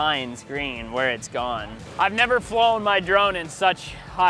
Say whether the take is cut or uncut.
cut